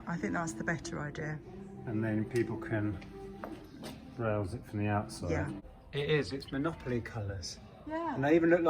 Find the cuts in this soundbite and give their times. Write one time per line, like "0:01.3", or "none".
0:05.7